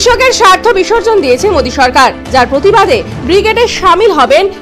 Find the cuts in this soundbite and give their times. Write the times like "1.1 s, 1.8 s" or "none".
none

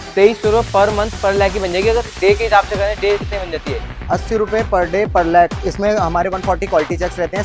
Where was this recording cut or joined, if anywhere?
5.6 s

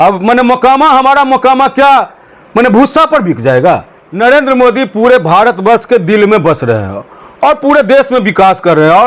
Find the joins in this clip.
4.1 s

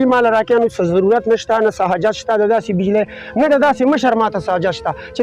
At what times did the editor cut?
none

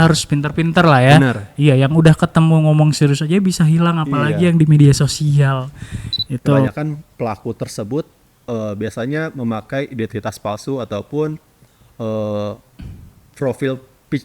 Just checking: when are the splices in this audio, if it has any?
6.7 s

